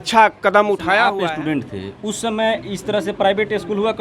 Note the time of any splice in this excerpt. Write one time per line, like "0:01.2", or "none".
0:01.1